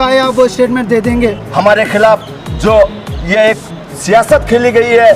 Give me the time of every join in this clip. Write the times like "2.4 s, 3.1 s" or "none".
1.4 s